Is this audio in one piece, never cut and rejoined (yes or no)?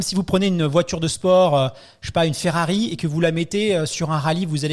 yes